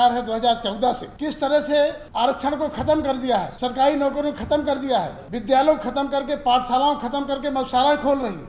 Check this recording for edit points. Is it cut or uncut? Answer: cut